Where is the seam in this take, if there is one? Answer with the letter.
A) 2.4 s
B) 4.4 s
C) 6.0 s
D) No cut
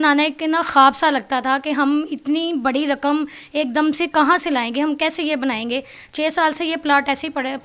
D